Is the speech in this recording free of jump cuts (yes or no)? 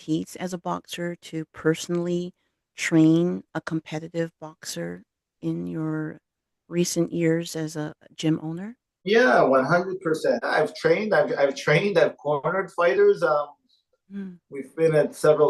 no